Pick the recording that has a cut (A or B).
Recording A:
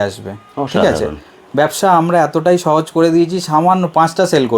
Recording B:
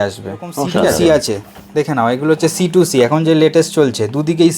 B